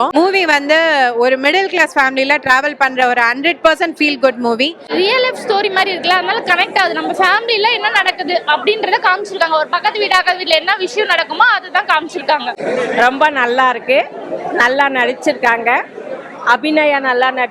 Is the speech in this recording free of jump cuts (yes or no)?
no